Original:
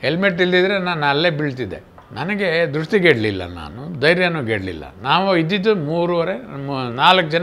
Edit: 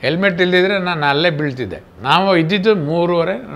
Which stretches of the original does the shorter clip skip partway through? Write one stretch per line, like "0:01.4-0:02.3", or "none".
0:01.9-0:04.9